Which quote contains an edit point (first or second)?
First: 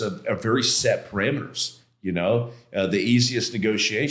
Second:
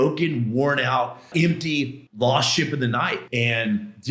second